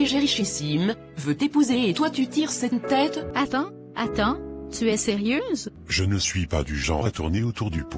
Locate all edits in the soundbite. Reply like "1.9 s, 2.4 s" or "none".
3.3 s, 5.8 s